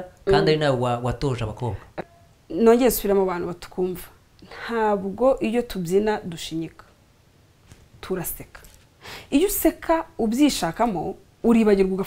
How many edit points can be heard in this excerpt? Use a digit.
1